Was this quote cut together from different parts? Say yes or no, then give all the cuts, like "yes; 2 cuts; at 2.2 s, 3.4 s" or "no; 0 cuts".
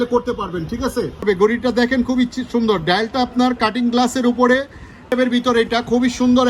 yes; 2 cuts; at 1.2 s, 5.1 s